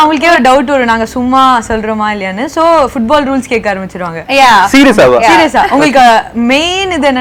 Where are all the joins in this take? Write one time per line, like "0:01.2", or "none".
none